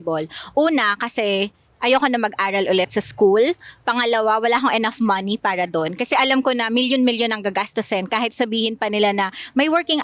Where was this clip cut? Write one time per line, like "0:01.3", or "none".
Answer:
none